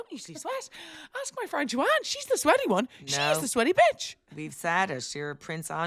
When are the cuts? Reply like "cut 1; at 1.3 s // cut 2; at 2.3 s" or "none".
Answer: none